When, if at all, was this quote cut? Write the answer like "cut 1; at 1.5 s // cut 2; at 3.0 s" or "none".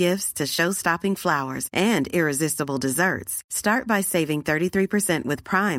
none